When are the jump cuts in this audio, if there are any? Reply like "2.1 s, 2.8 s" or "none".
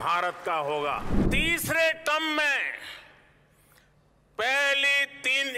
1.2 s

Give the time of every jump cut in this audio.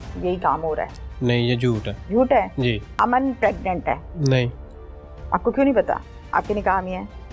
1.9 s, 2.9 s, 4.1 s

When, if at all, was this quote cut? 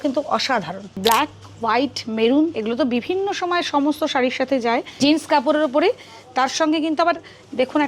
1.0 s, 4.9 s

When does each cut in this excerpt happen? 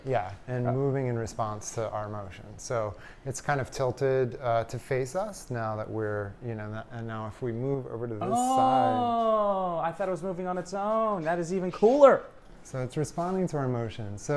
none

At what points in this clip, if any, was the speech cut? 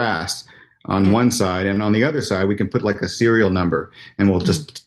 none

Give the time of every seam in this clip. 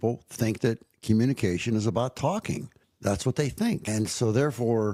none

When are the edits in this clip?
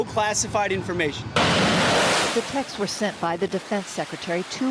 none

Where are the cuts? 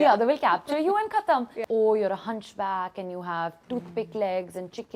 1.5 s

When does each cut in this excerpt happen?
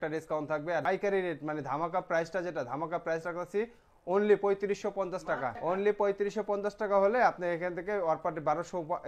0.9 s, 5.6 s

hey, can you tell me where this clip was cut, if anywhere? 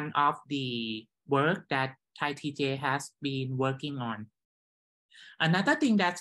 none

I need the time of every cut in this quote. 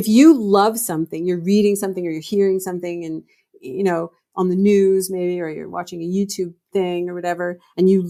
none

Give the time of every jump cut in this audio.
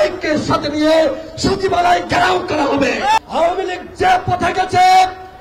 3.2 s

